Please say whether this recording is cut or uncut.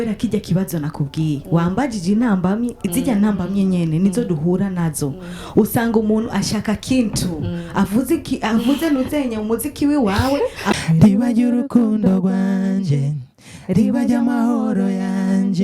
cut